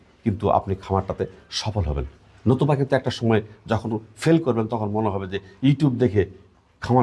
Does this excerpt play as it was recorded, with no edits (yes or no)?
yes